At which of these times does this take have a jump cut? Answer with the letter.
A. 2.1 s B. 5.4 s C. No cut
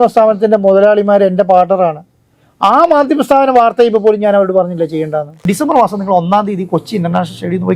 B